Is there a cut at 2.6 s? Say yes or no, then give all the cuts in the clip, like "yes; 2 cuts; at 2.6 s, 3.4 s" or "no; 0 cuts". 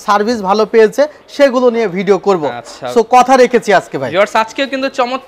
no; 0 cuts